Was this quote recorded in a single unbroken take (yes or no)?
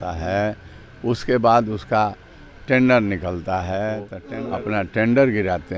no